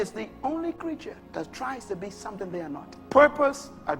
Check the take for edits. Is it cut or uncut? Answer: cut